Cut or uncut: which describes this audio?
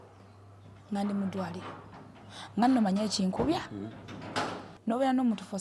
cut